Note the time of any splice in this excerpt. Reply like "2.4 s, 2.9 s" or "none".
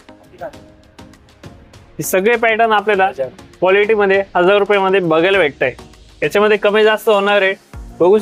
none